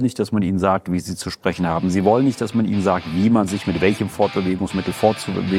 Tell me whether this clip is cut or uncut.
uncut